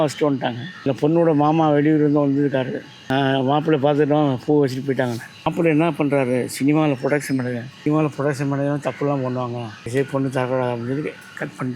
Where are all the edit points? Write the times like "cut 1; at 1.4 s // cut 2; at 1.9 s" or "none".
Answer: cut 1; at 0.9 s // cut 2; at 2.9 s // cut 3; at 5.5 s // cut 4; at 7.7 s // cut 5; at 9.9 s